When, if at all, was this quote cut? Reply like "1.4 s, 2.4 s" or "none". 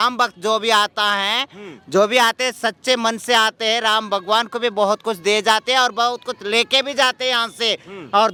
none